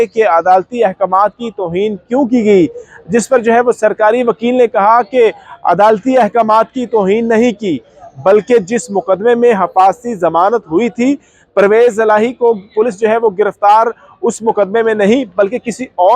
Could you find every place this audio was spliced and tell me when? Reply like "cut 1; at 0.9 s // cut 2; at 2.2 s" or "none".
none